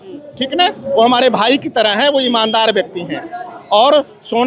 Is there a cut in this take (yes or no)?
no